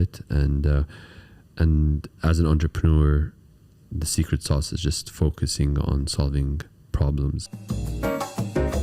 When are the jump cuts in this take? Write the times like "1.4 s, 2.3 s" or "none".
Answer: 7.4 s